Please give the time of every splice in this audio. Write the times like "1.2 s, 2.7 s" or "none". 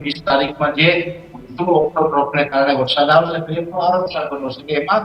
none